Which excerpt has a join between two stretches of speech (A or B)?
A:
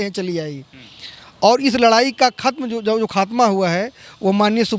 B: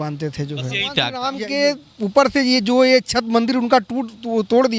B